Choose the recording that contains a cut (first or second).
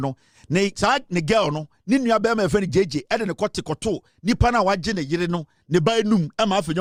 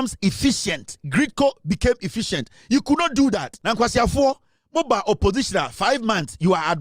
second